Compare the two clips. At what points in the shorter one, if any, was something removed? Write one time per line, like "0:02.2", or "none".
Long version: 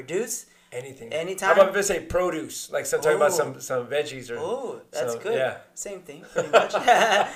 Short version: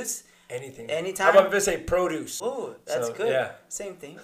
0:02.3